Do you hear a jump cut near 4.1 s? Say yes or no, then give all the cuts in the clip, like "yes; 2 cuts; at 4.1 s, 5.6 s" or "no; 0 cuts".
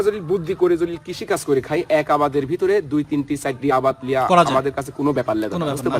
yes; 1 cut; at 4.1 s